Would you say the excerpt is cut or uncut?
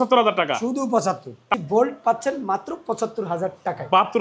cut